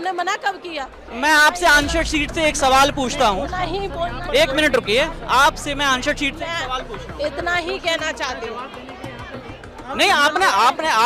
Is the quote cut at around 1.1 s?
yes; 1 cut; at 1.1 s

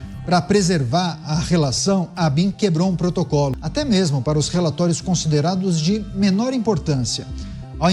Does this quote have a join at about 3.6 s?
yes; 1 cut; at 3.6 s

